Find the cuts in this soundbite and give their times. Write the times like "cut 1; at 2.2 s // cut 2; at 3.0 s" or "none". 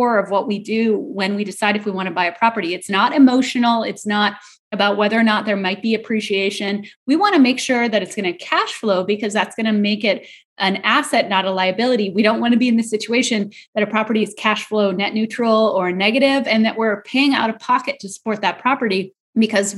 none